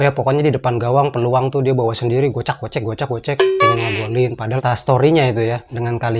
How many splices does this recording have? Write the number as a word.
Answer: one